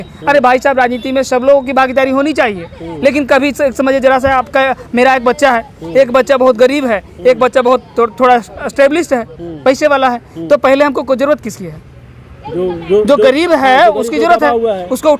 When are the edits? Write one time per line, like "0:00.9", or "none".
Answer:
none